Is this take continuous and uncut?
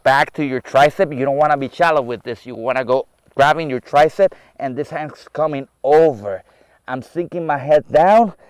yes; 0 cuts

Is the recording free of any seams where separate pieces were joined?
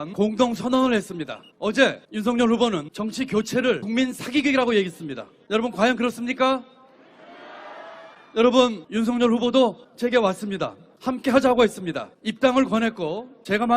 no; 1 cut; at 8.8 s

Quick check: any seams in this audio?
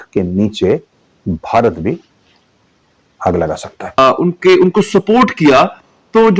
yes; 1 cut; at 4.0 s

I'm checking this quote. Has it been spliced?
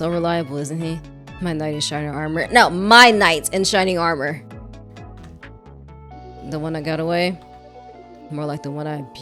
no; 0 cuts

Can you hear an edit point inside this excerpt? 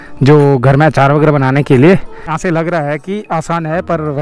yes; 1 cut; at 2.3 s

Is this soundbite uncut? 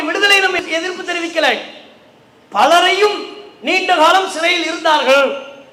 yes; 0 cuts

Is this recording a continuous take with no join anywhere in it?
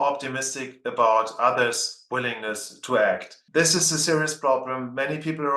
yes; 0 cuts

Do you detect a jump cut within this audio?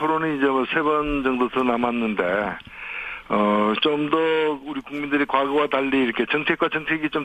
no; 0 cuts

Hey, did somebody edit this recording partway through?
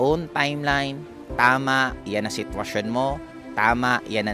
no; 0 cuts

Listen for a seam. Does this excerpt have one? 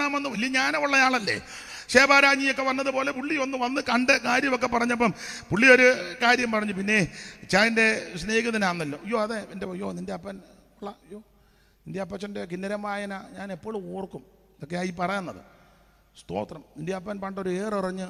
no; 0 cuts

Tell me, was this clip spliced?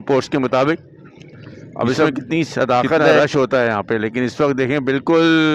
yes; 1 cut; at 3.2 s

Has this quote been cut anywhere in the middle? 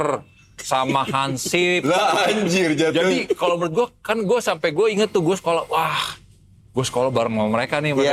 no; 0 cuts

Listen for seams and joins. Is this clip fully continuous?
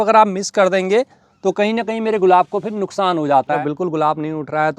no; 1 cut; at 3.6 s

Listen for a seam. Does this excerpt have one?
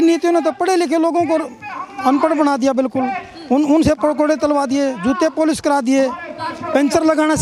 no; 0 cuts

